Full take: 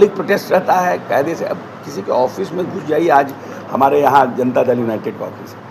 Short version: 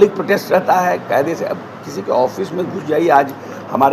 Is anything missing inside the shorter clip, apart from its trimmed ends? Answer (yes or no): no